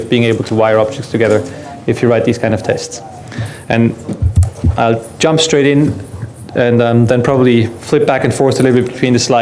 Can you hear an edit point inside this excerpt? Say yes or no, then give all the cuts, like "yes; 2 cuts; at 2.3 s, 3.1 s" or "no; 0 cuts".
no; 0 cuts